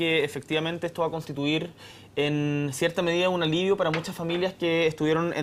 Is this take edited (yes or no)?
no